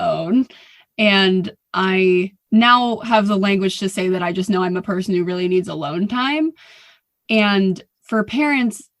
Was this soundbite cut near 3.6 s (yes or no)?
no